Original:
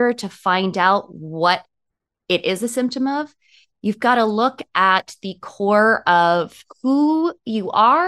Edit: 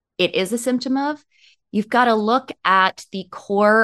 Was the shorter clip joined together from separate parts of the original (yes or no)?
no